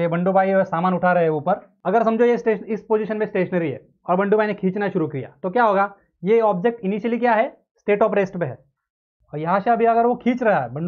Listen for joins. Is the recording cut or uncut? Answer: uncut